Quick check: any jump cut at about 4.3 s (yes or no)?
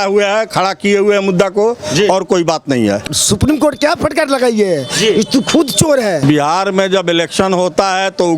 no